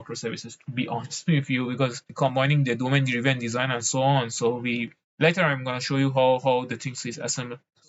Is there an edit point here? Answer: no; 0 cuts

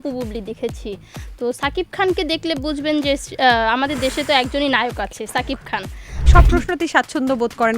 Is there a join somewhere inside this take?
yes; 1 cut; at 6.3 s

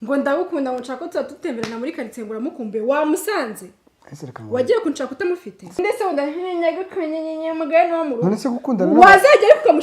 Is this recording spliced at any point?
yes; 1 cut; at 5.8 s

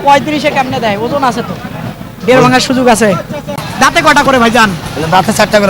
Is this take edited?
yes; 1 cut; at 3.7 s

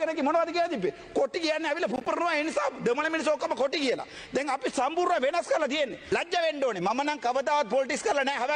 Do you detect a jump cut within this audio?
yes; 1 cut; at 6.0 s

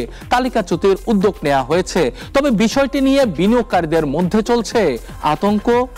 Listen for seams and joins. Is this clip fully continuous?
yes; 0 cuts

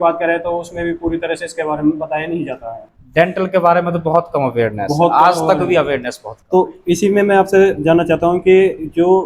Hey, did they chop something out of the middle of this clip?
no; 0 cuts

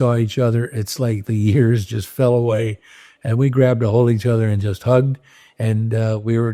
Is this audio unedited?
yes; 0 cuts

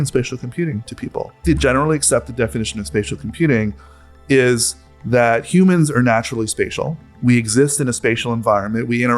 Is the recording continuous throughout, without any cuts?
no; 2 cuts; at 1.4 s, 4.2 s

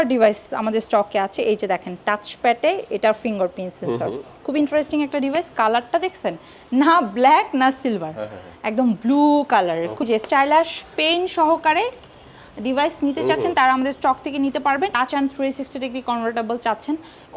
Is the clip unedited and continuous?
no; 2 cuts; at 10.1 s, 14.9 s

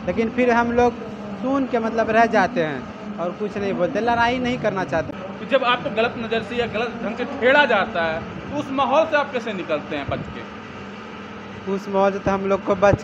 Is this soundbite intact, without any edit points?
no; 1 cut; at 5.1 s

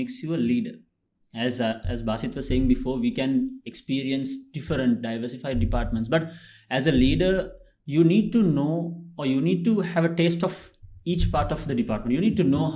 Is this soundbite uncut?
yes; 0 cuts

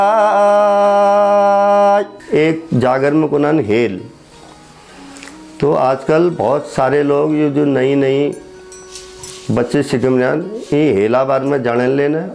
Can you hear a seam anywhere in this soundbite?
yes; 1 cut; at 2.2 s

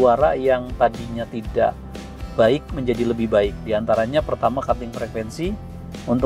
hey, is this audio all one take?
yes; 0 cuts

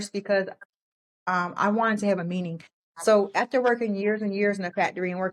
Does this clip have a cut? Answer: no; 0 cuts

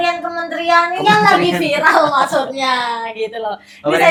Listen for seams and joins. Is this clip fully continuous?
yes; 0 cuts

